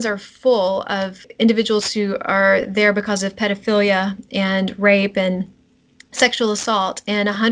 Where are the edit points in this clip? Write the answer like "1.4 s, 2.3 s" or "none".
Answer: 1.2 s